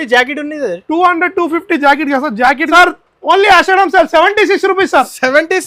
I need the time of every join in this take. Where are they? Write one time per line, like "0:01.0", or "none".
0:02.7